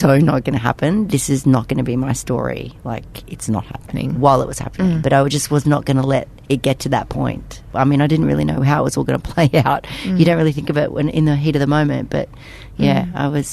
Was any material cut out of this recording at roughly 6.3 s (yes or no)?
no